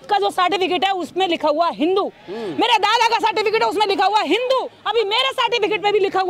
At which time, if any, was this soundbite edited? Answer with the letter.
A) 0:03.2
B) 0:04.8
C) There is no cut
B